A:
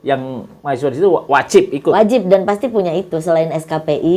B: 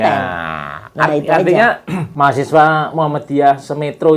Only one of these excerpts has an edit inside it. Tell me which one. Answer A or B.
B